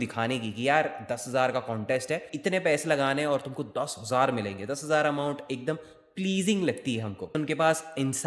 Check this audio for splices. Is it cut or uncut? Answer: cut